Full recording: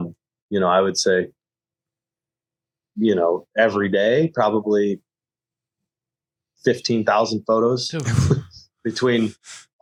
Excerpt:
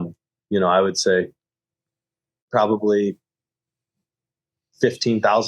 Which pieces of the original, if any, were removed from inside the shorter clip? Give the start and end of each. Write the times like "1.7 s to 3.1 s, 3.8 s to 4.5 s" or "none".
2.5 s to 4.3 s